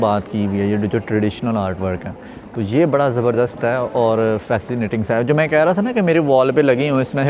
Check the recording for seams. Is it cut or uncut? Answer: uncut